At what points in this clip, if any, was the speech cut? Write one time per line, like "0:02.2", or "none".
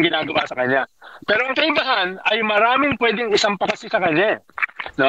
none

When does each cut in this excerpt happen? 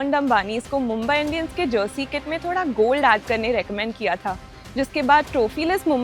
none

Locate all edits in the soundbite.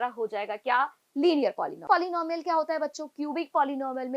0:01.8

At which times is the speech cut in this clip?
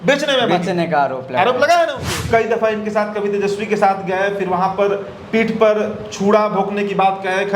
0:02.2

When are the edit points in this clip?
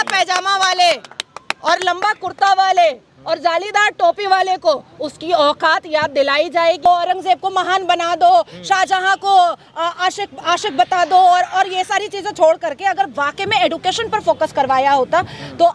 0:06.9

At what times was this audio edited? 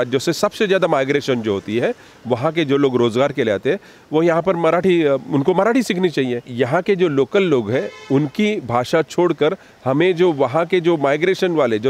0:06.5

